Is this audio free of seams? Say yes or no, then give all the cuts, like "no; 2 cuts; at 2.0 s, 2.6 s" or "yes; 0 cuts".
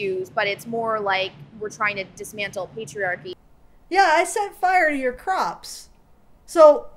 no; 1 cut; at 3.3 s